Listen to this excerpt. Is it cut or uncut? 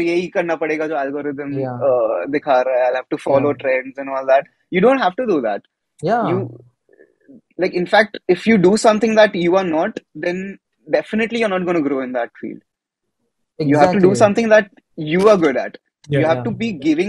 uncut